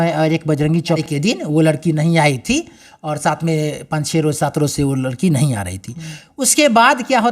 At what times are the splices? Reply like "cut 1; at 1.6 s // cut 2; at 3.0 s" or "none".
cut 1; at 1.0 s